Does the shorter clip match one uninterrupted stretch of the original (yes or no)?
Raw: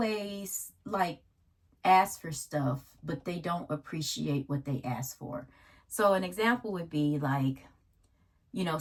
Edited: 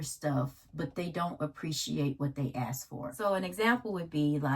no